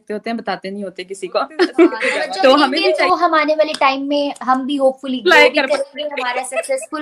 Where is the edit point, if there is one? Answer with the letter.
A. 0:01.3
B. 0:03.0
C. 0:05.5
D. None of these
B